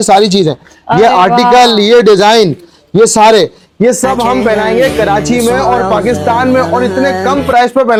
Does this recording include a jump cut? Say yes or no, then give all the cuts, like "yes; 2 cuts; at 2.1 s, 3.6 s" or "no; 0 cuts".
no; 0 cuts